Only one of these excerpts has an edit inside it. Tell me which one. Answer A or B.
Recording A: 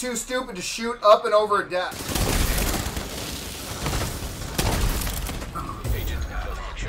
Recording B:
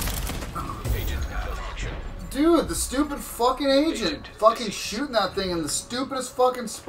A